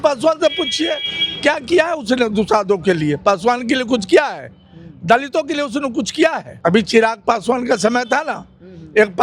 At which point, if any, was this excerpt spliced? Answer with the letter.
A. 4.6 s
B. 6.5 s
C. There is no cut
B